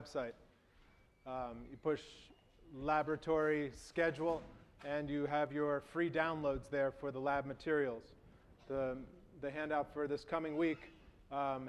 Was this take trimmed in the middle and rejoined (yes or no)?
no